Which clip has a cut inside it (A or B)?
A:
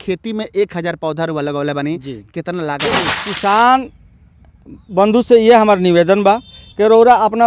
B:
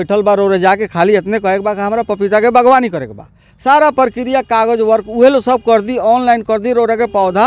A